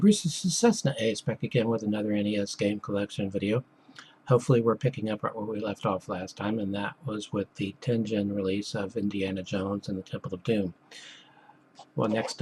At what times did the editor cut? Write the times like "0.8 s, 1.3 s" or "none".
none